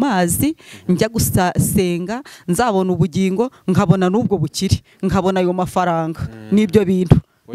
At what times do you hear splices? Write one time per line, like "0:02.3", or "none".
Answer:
none